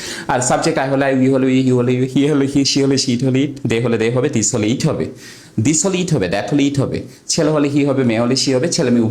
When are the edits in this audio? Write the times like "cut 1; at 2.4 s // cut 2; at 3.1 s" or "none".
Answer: cut 1; at 1.6 s